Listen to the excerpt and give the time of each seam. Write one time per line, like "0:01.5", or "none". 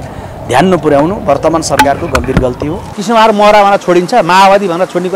0:02.9